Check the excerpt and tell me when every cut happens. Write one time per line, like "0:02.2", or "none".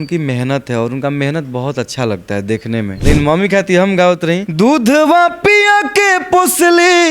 0:02.9
0:04.5